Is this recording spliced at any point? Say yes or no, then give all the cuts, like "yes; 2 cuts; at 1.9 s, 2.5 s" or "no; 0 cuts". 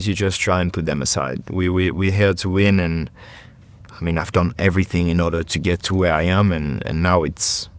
no; 0 cuts